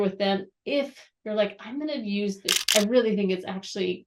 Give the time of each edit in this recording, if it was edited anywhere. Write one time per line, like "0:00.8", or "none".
0:02.5